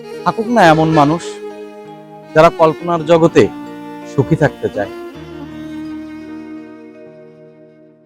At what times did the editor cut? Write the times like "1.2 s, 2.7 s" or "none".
4.9 s